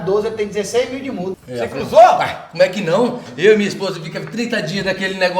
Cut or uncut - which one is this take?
cut